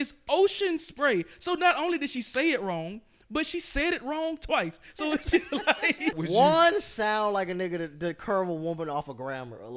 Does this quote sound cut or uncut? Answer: cut